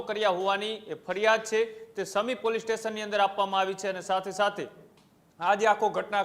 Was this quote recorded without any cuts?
yes; 0 cuts

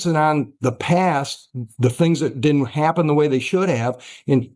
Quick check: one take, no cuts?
yes; 0 cuts

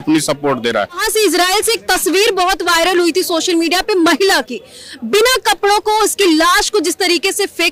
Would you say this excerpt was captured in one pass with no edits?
no; 1 cut; at 1.0 s

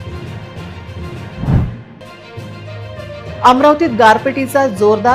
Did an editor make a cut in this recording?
yes; 1 cut; at 1.3 s

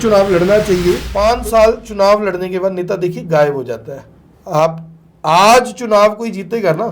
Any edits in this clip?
yes; 1 cut; at 1.1 s

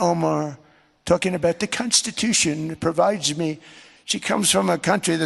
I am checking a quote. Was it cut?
no; 0 cuts

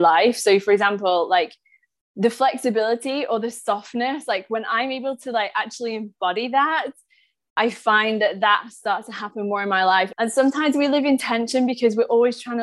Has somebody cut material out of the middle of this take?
yes; 1 cut; at 10.1 s

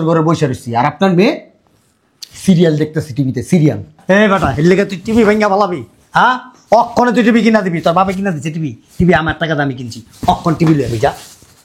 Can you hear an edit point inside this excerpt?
no; 0 cuts

